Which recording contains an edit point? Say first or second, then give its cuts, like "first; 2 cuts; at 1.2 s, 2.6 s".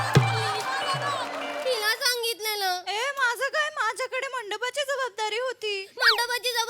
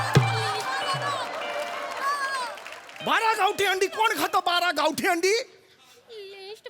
first; 1 cut; at 1.6 s